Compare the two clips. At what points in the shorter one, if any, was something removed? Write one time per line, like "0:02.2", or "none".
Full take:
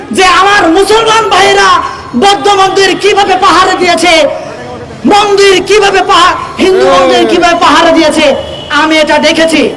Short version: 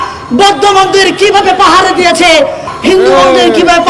0:02.7